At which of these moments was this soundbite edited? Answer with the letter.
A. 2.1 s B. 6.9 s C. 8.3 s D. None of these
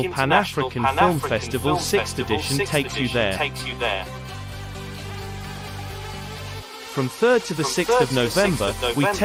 D